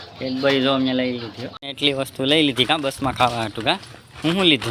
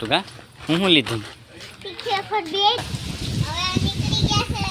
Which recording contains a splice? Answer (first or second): second